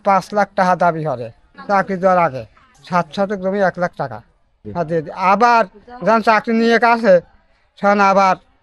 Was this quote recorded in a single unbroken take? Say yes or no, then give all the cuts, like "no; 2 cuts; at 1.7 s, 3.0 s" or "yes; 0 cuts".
yes; 0 cuts